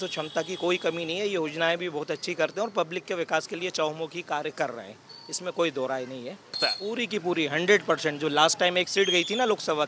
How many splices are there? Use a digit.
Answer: 1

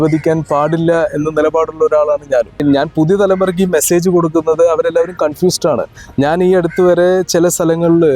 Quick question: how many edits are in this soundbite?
1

